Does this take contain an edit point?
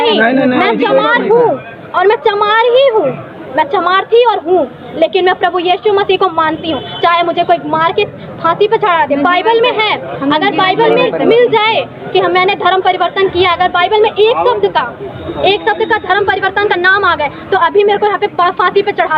no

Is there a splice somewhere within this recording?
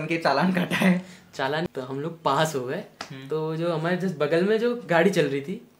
yes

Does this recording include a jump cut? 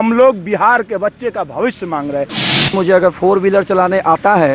yes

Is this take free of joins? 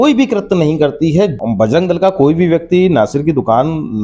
no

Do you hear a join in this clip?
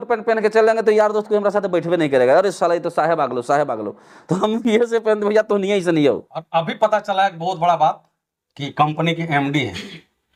no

